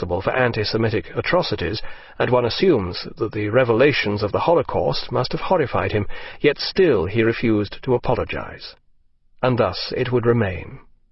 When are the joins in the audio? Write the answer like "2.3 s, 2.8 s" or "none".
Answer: 5.0 s